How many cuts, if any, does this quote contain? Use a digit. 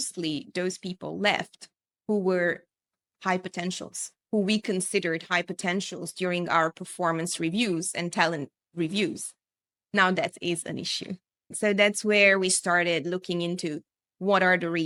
0